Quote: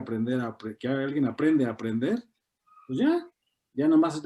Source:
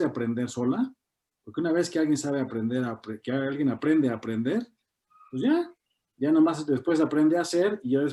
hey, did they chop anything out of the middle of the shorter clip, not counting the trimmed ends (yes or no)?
no